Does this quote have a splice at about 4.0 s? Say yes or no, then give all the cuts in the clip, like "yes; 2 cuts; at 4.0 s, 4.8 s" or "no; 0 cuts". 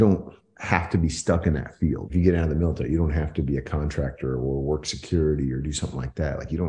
no; 1 cut; at 2.0 s